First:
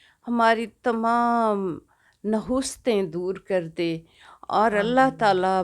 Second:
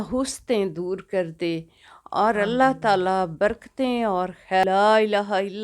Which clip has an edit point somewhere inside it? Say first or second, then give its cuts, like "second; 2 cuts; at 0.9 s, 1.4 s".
second; 1 cut; at 4.6 s